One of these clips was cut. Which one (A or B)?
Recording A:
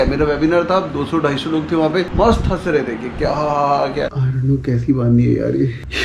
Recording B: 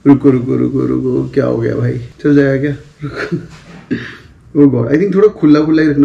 A